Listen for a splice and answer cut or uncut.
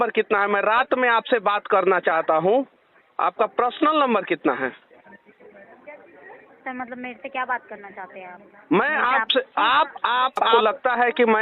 cut